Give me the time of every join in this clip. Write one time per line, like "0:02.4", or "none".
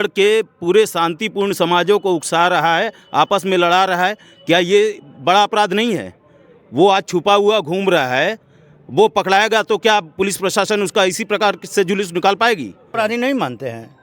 0:12.9